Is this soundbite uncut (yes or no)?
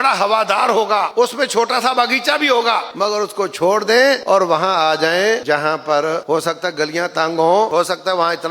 no